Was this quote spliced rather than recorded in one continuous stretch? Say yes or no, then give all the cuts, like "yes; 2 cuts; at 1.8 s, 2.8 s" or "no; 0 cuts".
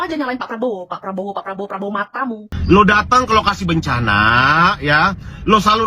yes; 1 cut; at 2.5 s